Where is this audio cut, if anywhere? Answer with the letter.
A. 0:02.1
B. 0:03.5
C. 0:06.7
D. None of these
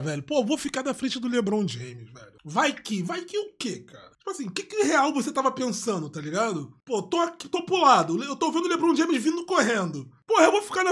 D